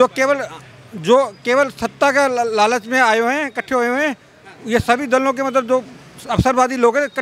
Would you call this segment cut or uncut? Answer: uncut